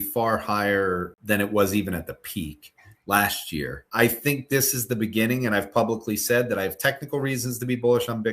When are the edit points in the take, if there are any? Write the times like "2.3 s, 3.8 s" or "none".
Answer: 1.1 s, 3.8 s